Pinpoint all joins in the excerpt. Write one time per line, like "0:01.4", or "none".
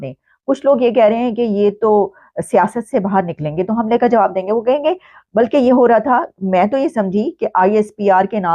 none